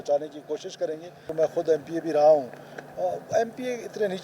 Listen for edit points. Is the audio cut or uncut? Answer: cut